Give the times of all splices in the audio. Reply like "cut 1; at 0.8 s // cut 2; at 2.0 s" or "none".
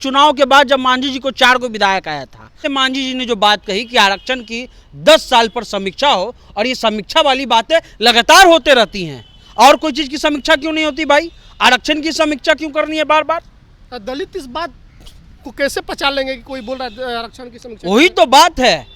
cut 1; at 2.6 s